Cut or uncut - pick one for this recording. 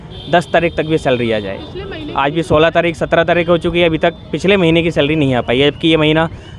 uncut